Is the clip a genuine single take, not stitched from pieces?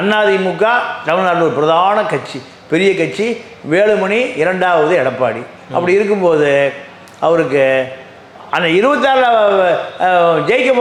yes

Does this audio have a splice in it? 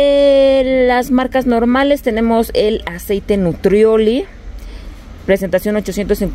no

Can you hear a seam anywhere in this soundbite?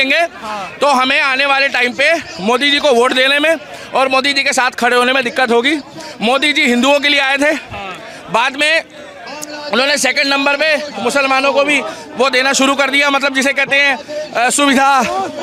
no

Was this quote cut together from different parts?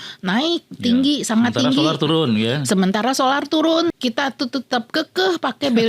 yes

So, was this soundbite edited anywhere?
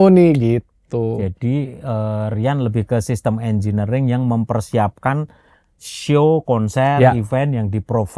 no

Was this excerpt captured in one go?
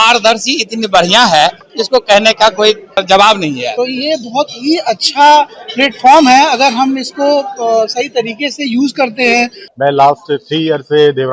no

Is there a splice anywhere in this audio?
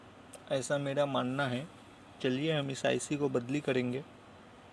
no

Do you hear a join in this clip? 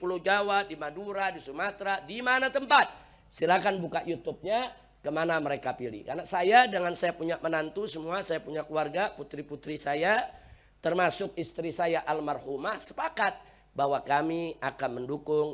no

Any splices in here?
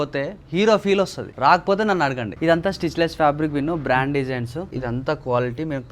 yes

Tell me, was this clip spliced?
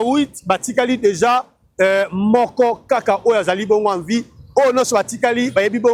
no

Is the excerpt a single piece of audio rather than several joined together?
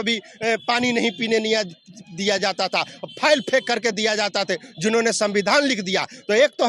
yes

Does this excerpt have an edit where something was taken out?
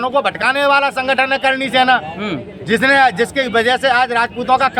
no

